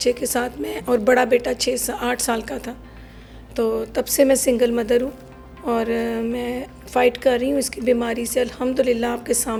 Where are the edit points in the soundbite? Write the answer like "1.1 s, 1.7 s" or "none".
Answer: none